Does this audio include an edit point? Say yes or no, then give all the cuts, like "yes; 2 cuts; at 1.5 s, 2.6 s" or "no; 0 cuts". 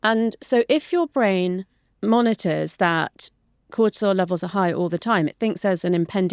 no; 0 cuts